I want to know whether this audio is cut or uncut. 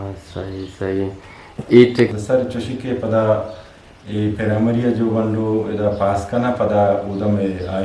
cut